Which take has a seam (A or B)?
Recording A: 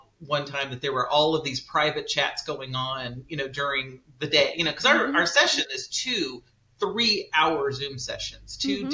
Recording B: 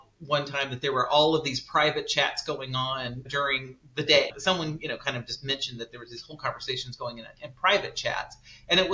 B